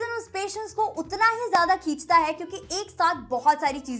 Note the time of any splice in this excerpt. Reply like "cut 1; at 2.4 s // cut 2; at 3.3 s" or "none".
none